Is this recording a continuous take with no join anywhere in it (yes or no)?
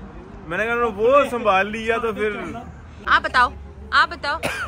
no